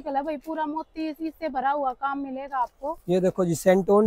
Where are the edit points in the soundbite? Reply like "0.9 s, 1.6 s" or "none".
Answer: none

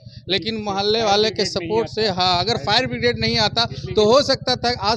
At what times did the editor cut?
none

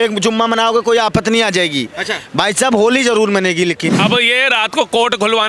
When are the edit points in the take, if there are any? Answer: 3.9 s

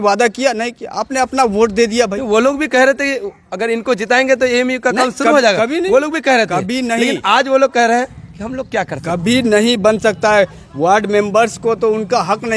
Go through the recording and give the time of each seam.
none

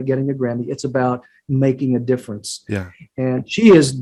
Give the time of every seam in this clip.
none

